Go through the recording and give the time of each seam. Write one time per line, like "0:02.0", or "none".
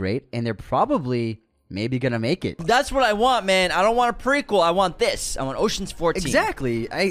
0:02.5